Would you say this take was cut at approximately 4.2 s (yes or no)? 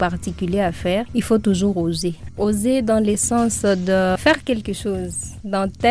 yes